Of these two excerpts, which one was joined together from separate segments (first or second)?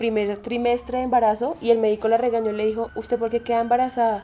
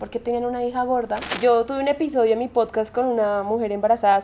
second